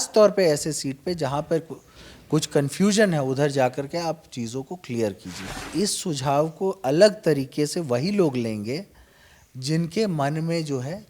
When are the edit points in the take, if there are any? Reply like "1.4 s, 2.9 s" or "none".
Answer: 5.6 s